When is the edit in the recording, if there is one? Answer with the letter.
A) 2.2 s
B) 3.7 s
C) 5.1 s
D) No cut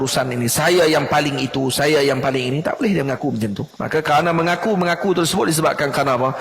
B